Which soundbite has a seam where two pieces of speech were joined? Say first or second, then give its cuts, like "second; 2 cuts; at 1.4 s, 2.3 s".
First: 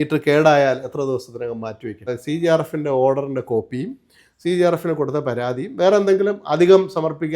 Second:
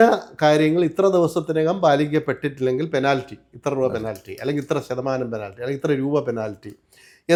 first; 1 cut; at 2.1 s